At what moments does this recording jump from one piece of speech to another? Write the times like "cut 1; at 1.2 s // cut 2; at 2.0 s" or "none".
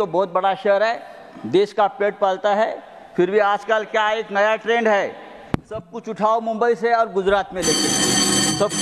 none

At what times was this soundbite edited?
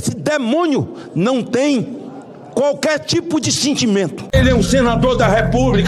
cut 1; at 4.3 s

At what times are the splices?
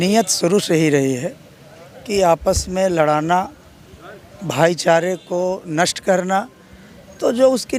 none

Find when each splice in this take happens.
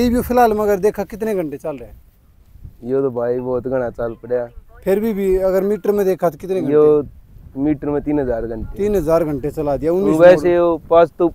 none

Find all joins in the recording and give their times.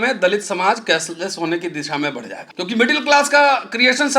cut 1; at 2.4 s

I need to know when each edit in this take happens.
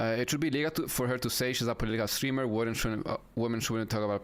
none

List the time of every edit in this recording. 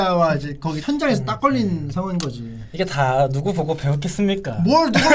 none

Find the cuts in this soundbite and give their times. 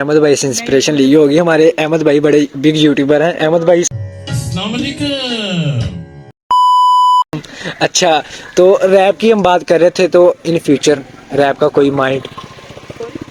none

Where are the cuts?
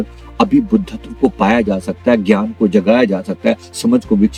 none

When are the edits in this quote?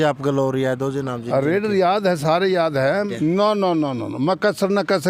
cut 1; at 3.1 s

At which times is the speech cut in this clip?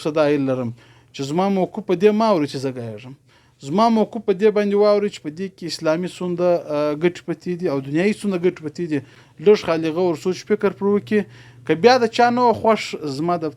none

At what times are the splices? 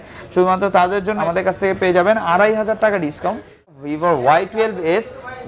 cut 1; at 1.2 s // cut 2; at 3.7 s

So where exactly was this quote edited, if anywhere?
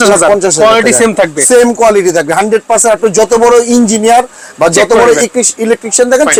none

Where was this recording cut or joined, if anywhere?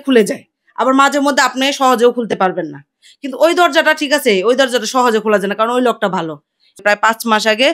cut 1; at 6.8 s

